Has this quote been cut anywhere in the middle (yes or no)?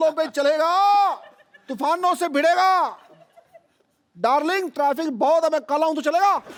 no